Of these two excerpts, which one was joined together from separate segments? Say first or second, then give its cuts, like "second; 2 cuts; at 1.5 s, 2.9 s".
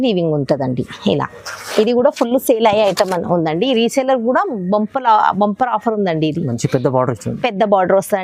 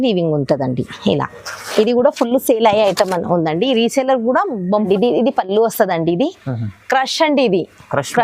second; 1 cut; at 4.9 s